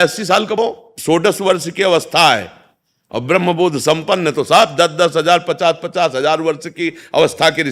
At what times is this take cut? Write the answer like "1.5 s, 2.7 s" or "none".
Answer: 0.9 s

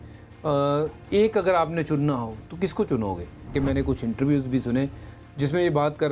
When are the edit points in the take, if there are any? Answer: 3.5 s

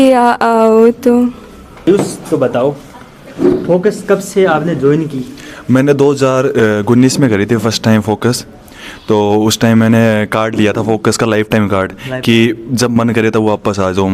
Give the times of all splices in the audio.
none

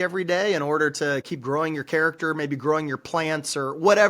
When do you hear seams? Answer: 1.3 s

